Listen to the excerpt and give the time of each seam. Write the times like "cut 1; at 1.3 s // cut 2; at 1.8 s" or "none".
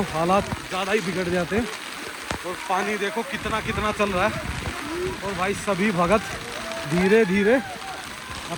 none